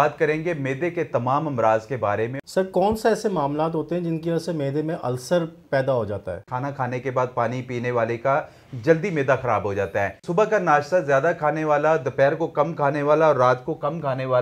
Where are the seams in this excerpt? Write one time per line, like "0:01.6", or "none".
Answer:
0:02.3
0:06.5
0:10.2